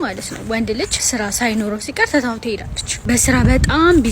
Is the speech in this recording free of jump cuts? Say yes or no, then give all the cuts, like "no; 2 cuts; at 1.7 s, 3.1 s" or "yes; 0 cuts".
no; 2 cuts; at 1.1 s, 2.9 s